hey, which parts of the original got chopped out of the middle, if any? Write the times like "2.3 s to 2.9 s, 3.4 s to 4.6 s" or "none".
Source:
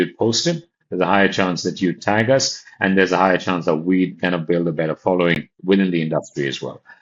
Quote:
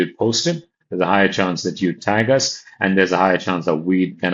none